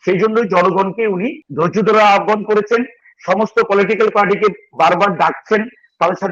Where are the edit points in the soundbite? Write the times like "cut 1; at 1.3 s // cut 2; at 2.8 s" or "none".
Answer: cut 1; at 1.4 s